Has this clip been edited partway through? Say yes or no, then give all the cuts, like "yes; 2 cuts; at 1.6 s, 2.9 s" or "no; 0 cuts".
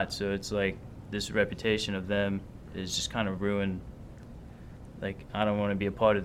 no; 0 cuts